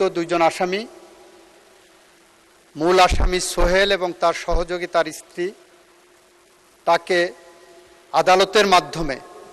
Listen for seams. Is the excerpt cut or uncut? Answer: uncut